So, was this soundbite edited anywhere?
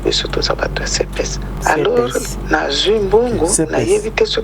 yes; 1 cut; at 1.5 s

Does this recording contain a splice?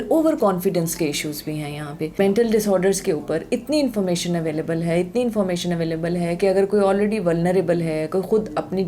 yes; 1 cut; at 2.1 s

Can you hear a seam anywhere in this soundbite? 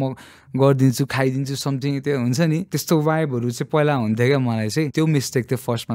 yes; 2 cuts; at 2.7 s, 4.9 s

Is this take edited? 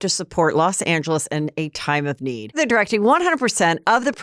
yes; 1 cut; at 2.5 s

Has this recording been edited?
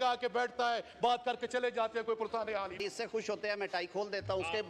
yes; 1 cut; at 2.8 s

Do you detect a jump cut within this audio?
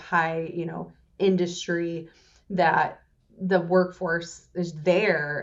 no; 0 cuts

